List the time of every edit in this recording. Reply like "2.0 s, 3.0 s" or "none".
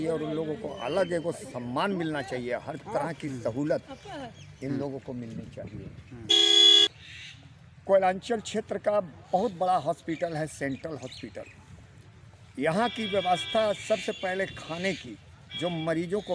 6.9 s